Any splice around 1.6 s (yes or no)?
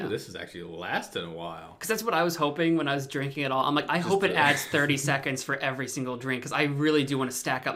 no